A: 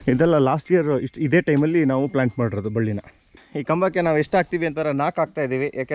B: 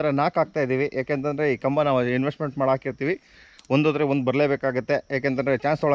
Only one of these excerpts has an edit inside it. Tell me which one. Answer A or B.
A